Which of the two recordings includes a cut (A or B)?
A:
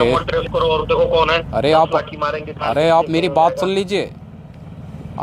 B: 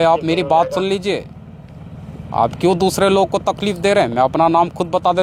A